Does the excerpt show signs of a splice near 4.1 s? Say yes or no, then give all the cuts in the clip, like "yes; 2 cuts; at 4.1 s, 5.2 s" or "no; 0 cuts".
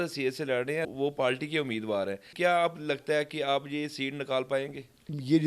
no; 2 cuts; at 0.9 s, 2.3 s